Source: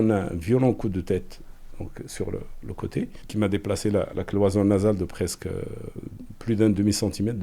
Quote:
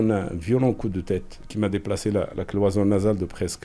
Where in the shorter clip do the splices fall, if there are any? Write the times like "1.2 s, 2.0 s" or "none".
1.4 s